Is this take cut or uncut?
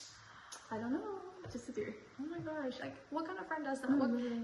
cut